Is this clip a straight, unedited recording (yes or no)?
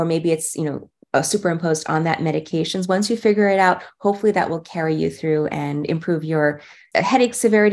no